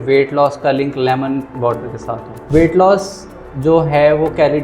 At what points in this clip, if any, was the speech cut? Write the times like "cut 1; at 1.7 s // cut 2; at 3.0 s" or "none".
cut 1; at 2.4 s